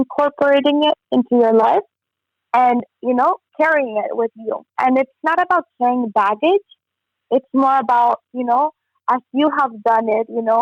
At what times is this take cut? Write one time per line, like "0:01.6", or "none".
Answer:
none